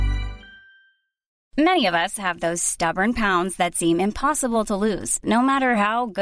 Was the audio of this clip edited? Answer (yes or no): yes